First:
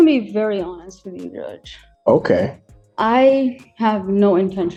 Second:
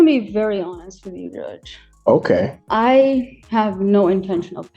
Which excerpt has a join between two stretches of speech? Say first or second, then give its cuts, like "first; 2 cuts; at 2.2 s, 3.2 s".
second; 1 cut; at 2.6 s